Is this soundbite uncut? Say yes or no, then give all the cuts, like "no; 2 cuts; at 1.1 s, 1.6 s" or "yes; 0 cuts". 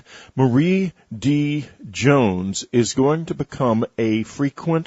yes; 0 cuts